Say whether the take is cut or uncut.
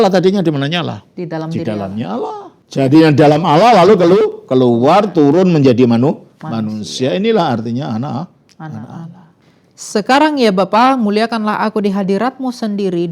cut